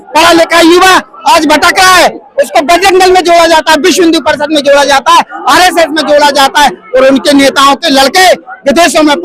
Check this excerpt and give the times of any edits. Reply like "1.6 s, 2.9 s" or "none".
none